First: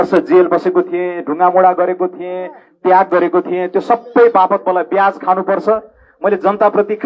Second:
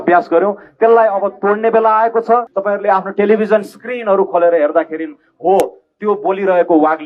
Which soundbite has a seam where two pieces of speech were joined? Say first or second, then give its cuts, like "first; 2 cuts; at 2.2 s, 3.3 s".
second; 1 cut; at 2.5 s